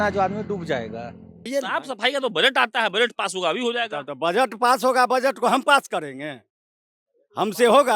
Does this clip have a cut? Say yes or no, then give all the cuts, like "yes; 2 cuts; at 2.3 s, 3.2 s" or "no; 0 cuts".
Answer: yes; 1 cut; at 1.5 s